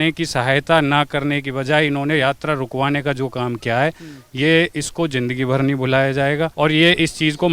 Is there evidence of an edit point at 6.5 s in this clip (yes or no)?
yes